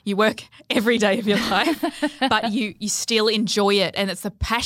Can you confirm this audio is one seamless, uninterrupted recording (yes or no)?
yes